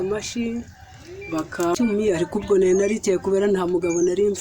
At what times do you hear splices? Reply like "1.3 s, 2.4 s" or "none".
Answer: 1.7 s